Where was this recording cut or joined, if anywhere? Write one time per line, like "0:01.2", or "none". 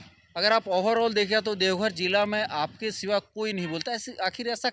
none

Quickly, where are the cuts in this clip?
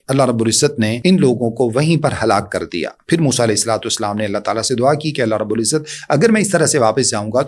0:01.0

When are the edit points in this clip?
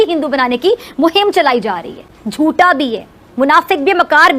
0:02.1

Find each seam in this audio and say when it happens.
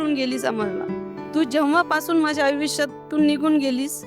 0:01.2

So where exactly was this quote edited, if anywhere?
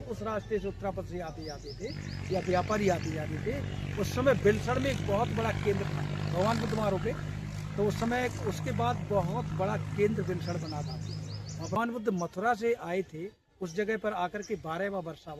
0:11.8

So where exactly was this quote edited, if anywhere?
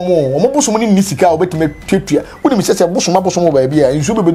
none

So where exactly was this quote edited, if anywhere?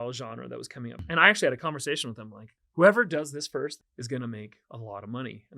0:01.0
0:02.6
0:03.8

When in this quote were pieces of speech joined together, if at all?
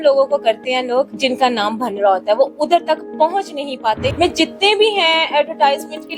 0:01.1
0:04.1

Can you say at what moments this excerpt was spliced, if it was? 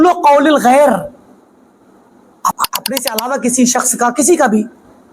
0:02.6

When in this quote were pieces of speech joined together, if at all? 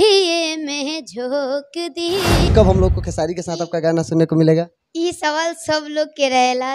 0:02.5

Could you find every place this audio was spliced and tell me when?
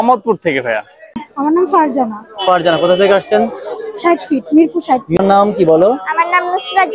0:01.2
0:05.2

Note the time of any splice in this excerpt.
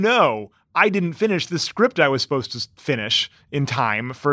none

